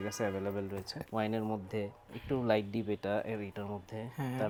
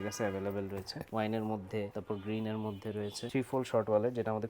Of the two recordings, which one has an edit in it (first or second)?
second